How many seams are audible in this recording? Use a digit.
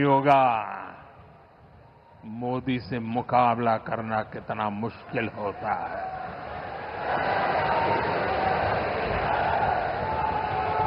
0